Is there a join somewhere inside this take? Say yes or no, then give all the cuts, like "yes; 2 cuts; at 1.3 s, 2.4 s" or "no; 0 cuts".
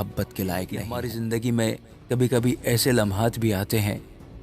yes; 1 cut; at 1.0 s